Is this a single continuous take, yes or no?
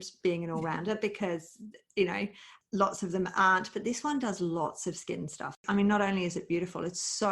no